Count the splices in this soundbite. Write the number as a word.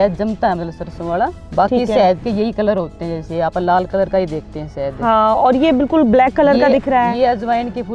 one